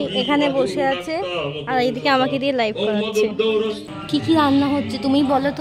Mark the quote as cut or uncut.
cut